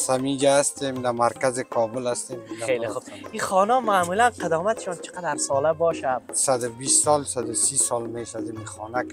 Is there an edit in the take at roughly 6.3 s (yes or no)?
yes